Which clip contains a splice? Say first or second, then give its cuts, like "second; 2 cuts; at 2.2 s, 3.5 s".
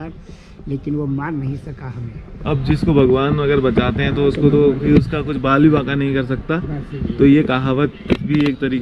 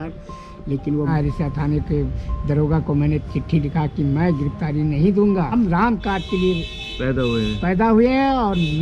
second; 2 cuts; at 1.1 s, 5.5 s